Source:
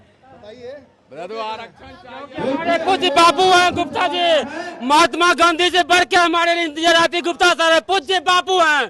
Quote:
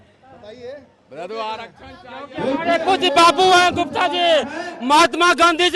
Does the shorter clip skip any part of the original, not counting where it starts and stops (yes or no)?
no